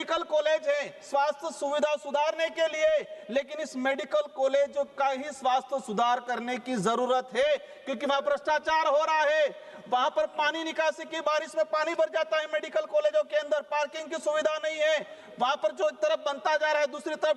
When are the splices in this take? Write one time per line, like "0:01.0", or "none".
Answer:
none